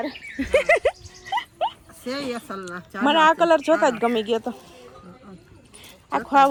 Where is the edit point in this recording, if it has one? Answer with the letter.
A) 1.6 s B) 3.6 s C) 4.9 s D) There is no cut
D